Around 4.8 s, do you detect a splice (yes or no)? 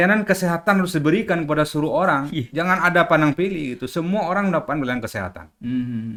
no